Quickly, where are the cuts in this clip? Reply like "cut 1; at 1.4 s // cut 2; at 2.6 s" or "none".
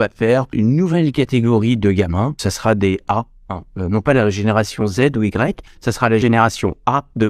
cut 1; at 6.2 s